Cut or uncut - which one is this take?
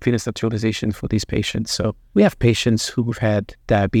cut